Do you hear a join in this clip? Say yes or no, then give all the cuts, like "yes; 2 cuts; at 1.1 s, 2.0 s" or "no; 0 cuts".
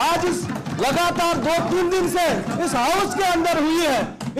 no; 0 cuts